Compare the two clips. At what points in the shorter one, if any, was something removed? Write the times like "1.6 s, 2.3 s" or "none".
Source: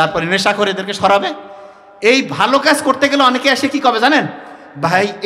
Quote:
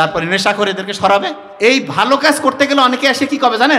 1.4 s